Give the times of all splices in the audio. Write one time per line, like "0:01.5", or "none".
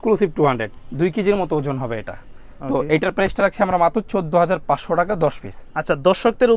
none